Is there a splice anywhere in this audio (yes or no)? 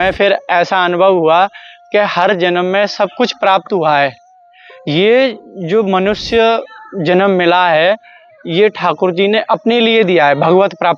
no